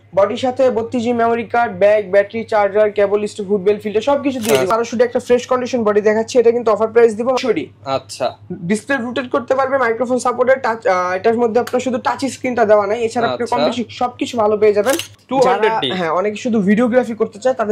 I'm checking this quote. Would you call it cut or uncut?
cut